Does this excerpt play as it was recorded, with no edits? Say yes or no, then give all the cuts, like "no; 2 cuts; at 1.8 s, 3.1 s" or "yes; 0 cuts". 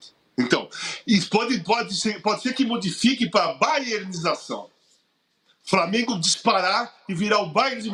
yes; 0 cuts